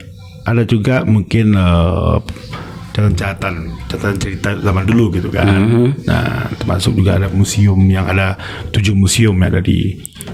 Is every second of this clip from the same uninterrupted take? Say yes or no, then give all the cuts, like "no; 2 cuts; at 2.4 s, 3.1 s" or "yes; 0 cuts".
yes; 0 cuts